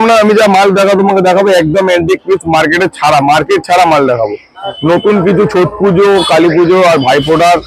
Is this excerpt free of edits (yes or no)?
no